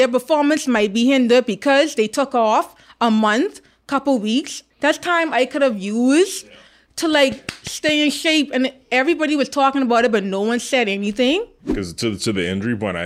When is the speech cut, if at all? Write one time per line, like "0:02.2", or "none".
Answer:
0:04.6
0:11.6

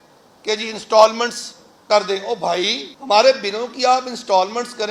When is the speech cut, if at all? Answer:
0:02.9

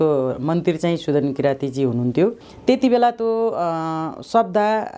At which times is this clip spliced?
0:02.5

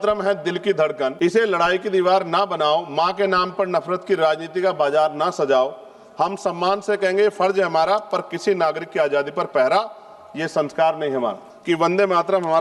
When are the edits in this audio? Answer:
0:01.1
0:11.5

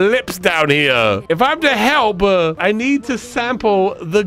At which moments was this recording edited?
none

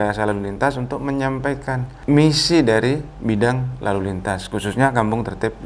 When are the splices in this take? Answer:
0:01.9

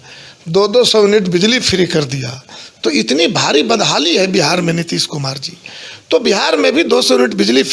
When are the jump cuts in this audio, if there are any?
none

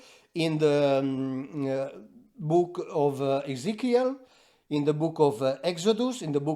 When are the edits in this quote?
none

